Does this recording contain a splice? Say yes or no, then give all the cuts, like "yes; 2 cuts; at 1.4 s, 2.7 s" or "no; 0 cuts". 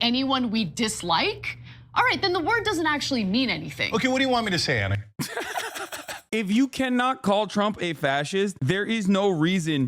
yes; 2 cuts; at 6.1 s, 8.6 s